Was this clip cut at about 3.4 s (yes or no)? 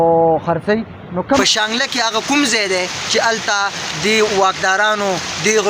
no